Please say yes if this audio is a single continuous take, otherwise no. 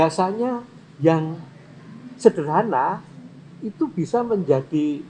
yes